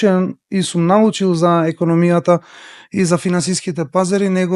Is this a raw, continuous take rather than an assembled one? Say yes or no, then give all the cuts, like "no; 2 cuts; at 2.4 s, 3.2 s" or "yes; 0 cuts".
yes; 0 cuts